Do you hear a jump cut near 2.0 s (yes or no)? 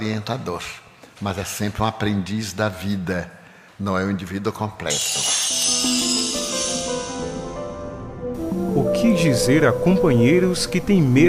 yes